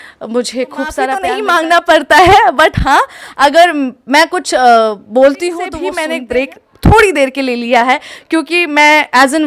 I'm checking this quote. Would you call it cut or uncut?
cut